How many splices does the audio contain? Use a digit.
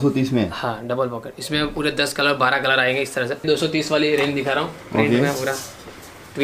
1